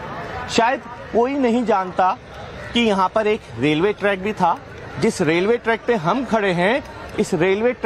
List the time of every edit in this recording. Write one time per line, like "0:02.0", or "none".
0:01.6